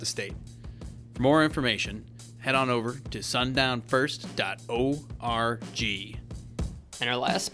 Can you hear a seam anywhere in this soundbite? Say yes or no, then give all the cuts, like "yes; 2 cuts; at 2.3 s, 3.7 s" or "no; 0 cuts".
yes; 1 cut; at 6.1 s